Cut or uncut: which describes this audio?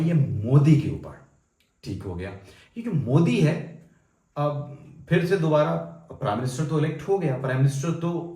uncut